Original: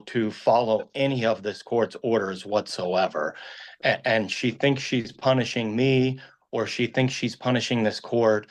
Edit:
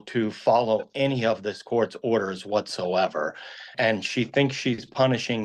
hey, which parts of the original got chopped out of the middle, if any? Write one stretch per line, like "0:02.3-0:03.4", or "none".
0:03.7-0:04.0